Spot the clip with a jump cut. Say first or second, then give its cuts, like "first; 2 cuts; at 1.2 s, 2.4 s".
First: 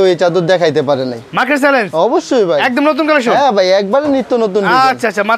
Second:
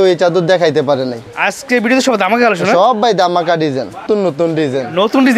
second; 2 cuts; at 1.2 s, 4.0 s